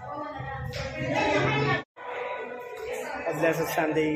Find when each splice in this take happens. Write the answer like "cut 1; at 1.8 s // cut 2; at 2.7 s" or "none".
cut 1; at 1.9 s